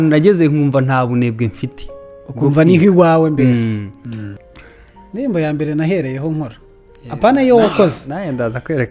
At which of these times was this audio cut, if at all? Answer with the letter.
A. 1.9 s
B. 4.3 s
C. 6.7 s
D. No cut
B